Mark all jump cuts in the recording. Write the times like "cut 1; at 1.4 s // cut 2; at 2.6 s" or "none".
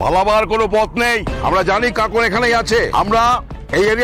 cut 1; at 1.3 s // cut 2; at 2.9 s